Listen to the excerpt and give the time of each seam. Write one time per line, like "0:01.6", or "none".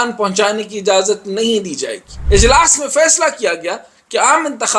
0:02.1